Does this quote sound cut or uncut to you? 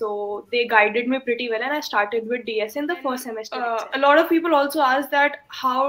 cut